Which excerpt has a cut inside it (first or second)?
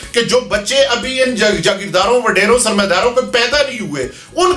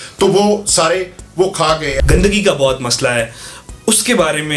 second